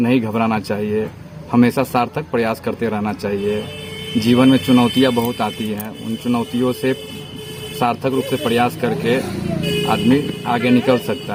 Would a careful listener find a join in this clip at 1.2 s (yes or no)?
no